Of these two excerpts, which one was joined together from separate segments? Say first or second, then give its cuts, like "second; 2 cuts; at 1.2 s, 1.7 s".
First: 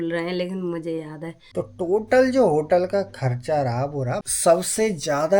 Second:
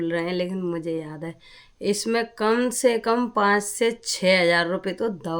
first; 2 cuts; at 1.4 s, 4.2 s